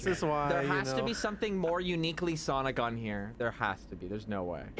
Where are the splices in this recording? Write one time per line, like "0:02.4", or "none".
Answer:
0:03.3